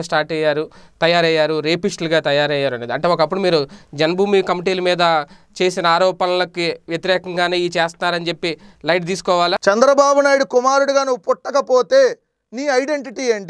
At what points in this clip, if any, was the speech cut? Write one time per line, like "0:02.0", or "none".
0:09.6